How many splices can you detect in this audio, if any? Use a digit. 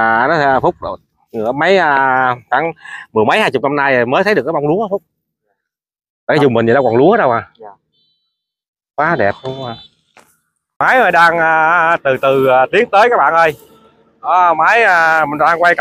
1